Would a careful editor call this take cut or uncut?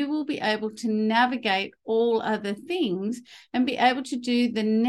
uncut